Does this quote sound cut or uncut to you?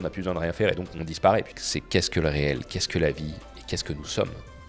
cut